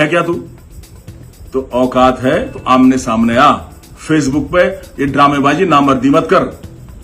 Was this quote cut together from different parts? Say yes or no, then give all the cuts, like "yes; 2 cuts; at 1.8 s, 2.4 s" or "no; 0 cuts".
no; 0 cuts